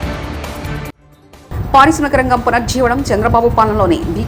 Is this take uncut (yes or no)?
yes